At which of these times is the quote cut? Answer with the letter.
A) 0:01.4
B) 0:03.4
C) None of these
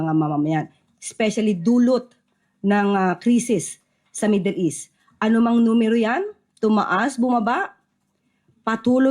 B